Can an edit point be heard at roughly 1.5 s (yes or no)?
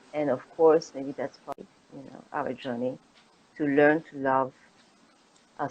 yes